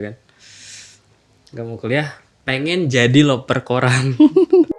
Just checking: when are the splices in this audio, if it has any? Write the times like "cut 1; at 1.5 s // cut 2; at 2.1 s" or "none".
none